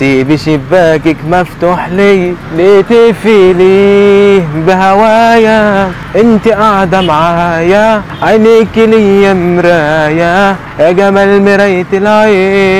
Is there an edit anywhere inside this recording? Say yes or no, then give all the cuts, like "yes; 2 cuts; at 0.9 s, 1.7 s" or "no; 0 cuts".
no; 0 cuts